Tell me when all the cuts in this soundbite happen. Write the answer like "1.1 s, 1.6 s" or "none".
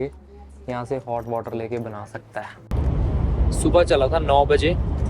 2.6 s